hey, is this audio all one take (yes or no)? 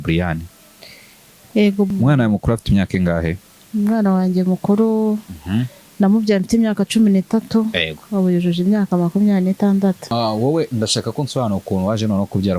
no